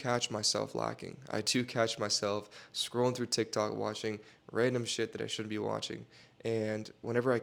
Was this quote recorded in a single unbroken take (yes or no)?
yes